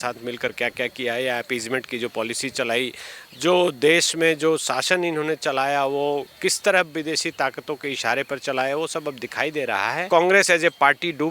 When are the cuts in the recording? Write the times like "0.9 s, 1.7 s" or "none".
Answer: 10.0 s